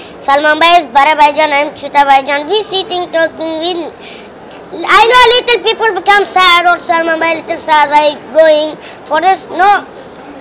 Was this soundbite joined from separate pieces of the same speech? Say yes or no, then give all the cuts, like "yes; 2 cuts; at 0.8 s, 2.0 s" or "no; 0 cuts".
no; 0 cuts